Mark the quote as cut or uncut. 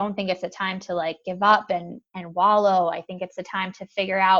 uncut